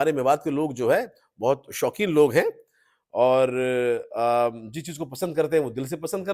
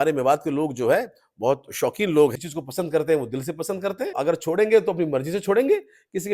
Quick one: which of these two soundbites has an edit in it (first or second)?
second